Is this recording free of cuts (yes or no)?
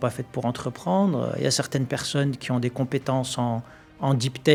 yes